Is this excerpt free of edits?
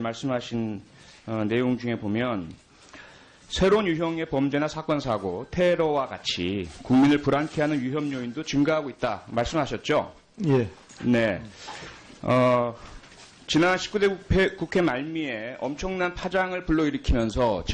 yes; 0 cuts

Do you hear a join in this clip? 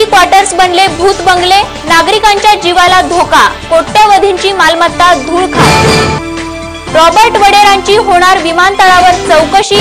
no; 0 cuts

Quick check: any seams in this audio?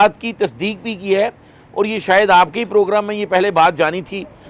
no; 0 cuts

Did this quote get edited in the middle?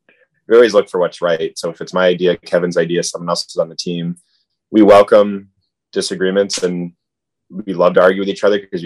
no; 0 cuts

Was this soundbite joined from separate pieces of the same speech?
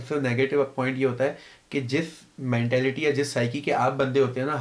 no; 0 cuts

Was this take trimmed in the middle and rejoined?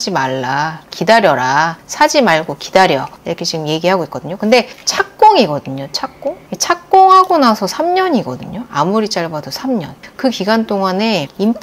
yes; 1 cut; at 10.1 s

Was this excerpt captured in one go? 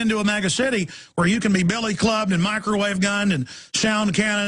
yes; 0 cuts

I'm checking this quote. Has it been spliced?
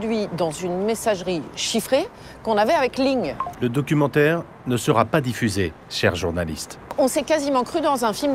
yes; 3 cuts; at 3.4 s, 5.8 s, 6.9 s

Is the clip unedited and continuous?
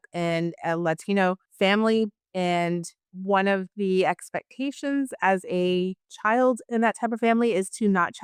yes; 0 cuts

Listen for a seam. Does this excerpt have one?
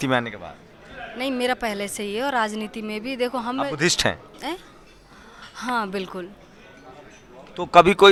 no; 0 cuts

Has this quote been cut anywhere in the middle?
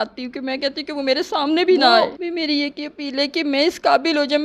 yes; 1 cut; at 2.2 s

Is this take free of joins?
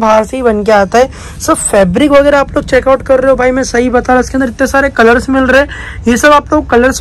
yes; 0 cuts

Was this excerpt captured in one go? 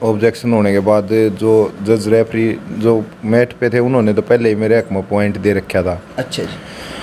yes; 0 cuts

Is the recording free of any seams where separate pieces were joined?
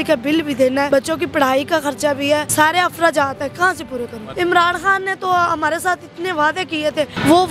no; 3 cuts; at 0.9 s, 2.5 s, 4.2 s

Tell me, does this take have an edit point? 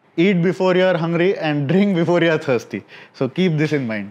no; 0 cuts

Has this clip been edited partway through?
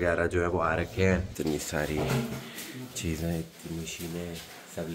yes; 1 cut; at 1.3 s

